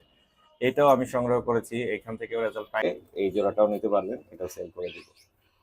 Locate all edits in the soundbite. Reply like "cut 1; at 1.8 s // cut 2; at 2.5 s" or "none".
cut 1; at 2.8 s